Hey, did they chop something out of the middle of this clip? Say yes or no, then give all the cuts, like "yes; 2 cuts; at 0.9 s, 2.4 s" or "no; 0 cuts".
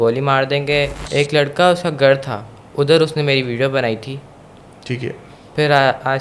yes; 1 cut; at 1.0 s